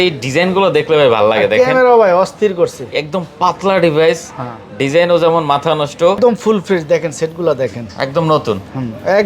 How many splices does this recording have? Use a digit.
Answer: 1